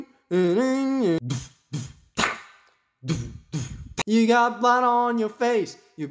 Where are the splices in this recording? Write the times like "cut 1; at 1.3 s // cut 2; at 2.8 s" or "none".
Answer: cut 1; at 1.2 s